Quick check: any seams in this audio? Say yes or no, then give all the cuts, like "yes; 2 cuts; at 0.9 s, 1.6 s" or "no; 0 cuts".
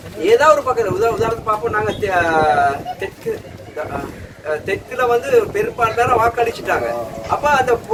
no; 0 cuts